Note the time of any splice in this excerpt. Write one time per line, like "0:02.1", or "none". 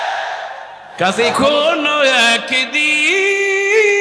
0:01.3

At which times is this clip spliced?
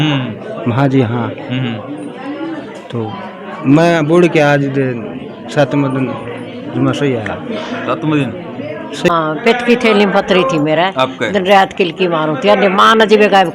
0:09.1

